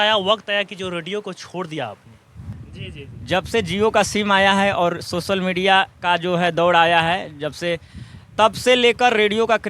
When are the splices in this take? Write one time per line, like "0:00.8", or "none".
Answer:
0:02.5